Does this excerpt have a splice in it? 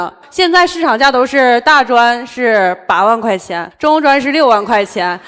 no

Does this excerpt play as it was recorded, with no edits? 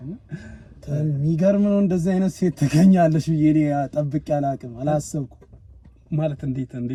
yes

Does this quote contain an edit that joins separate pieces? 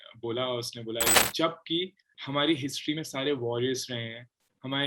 yes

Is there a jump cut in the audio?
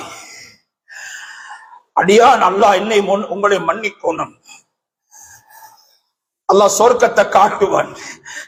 no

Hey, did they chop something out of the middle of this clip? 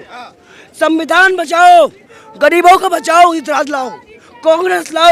no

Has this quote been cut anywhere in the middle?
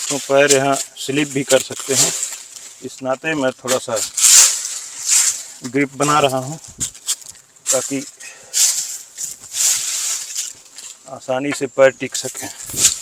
no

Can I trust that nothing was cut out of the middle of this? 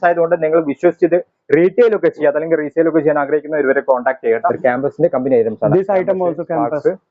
no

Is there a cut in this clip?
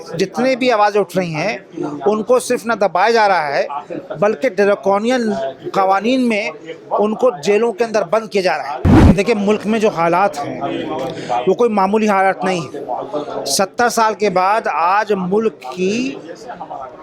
yes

